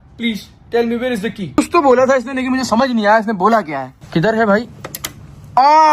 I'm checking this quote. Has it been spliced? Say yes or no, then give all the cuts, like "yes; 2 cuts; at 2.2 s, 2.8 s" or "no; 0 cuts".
yes; 1 cut; at 1.6 s